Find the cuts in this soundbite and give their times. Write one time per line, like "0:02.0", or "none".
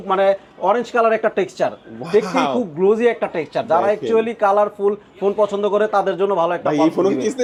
none